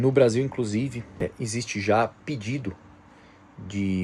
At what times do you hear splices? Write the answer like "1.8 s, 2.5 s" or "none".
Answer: 1.2 s